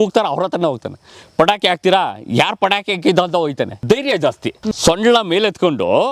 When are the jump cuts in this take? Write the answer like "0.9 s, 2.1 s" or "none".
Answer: 3.8 s, 4.8 s